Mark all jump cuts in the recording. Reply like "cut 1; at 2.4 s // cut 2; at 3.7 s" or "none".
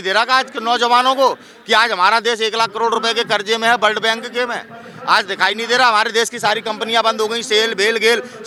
none